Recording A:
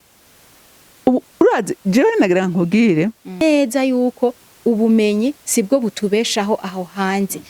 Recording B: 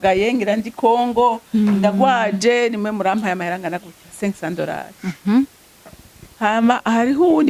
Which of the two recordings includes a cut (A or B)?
A